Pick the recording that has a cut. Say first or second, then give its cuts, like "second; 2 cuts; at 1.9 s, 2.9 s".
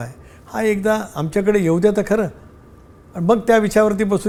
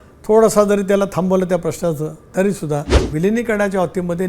second; 1 cut; at 3.0 s